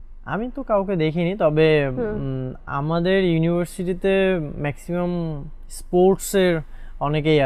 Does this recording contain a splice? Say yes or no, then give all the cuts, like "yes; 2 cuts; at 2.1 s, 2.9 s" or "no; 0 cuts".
no; 0 cuts